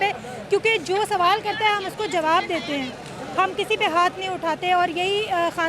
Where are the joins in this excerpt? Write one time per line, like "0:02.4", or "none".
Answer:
none